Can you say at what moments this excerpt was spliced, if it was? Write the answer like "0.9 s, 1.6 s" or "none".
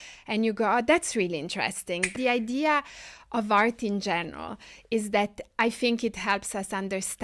2.1 s